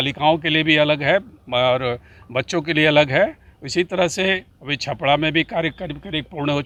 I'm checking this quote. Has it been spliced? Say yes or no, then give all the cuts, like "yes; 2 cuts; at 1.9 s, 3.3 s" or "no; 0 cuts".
no; 0 cuts